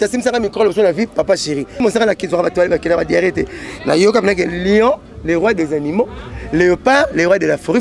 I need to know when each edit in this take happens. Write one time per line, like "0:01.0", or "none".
0:01.8